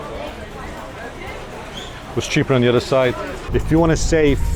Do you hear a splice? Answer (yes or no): yes